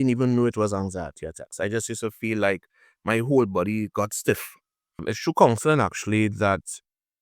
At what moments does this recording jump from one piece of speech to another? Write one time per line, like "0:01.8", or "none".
0:05.1